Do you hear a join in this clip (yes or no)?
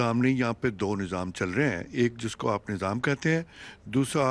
no